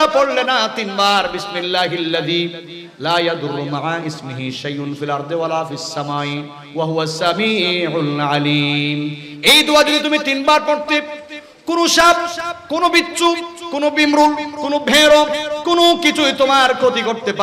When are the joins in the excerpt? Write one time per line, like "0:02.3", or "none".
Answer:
none